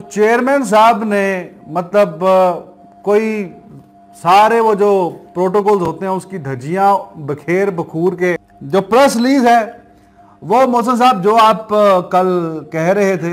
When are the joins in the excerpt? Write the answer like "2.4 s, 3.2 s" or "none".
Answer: 8.5 s